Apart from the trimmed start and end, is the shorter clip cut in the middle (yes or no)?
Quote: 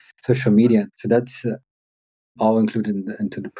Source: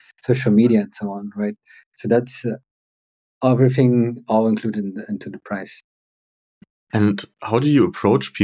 yes